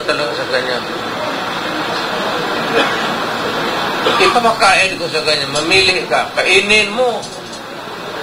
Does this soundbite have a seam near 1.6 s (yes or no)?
no